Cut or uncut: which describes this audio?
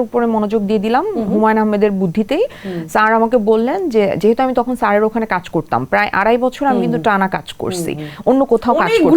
uncut